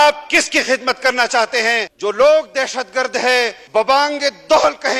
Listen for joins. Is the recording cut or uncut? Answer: cut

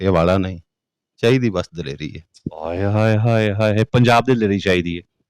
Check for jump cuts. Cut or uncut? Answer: uncut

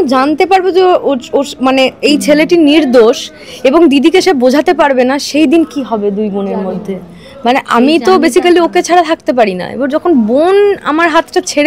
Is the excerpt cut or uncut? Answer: uncut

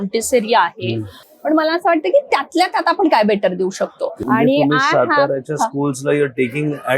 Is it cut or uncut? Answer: cut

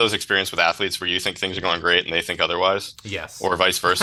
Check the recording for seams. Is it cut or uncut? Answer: uncut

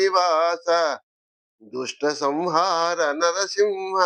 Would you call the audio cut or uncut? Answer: cut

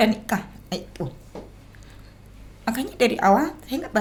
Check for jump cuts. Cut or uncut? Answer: uncut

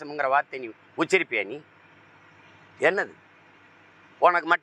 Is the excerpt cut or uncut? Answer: uncut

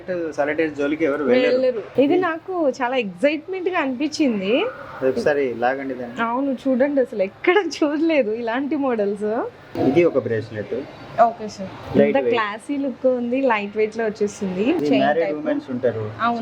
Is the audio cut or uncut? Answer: cut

